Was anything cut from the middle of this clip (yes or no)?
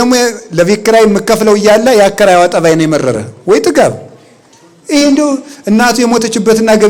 no